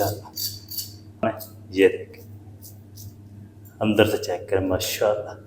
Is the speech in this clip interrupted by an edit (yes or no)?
yes